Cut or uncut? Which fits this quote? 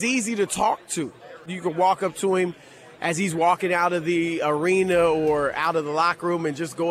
cut